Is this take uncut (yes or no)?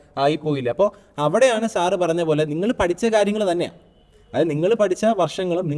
yes